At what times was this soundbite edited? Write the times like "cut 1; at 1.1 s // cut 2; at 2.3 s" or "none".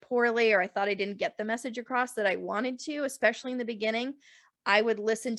none